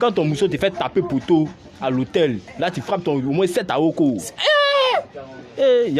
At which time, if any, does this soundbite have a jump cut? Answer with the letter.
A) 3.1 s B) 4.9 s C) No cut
B